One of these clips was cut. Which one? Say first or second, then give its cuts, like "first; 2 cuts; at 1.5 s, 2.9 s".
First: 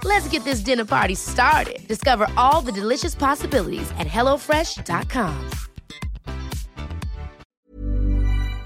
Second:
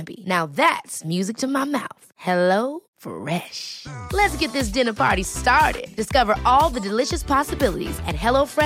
first; 1 cut; at 7.5 s